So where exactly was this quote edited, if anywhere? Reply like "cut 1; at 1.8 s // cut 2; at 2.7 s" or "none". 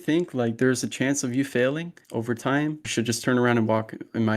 cut 1; at 2.0 s // cut 2; at 2.8 s